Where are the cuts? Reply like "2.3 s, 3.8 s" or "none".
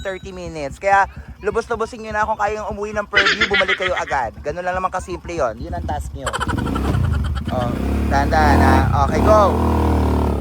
none